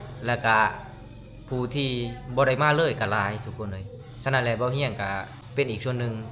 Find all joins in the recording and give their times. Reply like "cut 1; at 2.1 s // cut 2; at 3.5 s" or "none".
cut 1; at 5.4 s